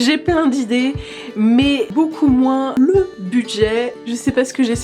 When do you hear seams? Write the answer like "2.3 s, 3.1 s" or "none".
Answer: 1.9 s, 2.8 s